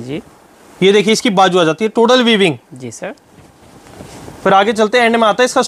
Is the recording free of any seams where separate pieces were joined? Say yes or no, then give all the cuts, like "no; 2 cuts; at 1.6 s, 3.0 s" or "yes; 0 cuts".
yes; 0 cuts